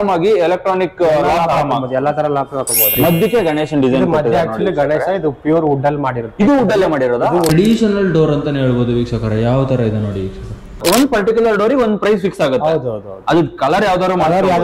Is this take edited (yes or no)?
yes